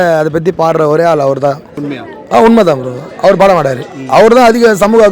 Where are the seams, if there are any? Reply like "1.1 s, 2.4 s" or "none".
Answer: 1.9 s